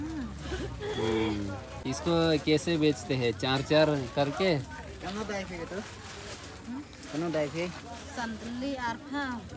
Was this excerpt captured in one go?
no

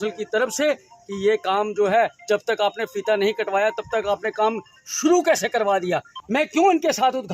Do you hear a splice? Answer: yes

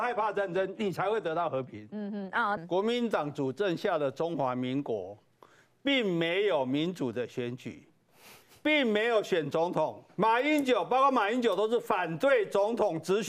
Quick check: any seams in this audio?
yes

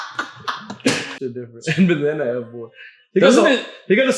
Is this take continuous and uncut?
no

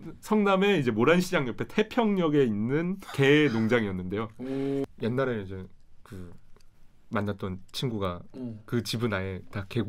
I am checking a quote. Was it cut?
yes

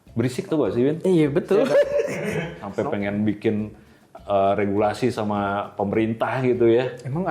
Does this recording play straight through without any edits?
no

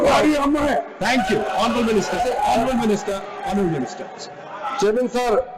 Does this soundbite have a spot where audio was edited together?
no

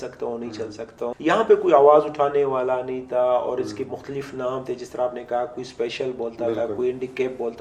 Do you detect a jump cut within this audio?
yes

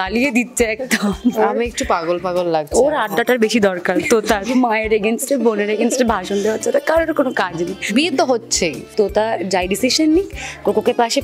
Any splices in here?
yes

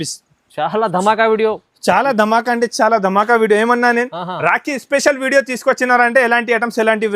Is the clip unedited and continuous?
yes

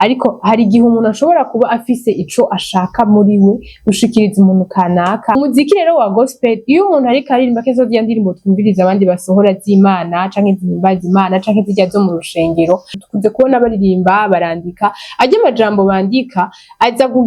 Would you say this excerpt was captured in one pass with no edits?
no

